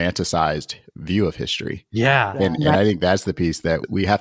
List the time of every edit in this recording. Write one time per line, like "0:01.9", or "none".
none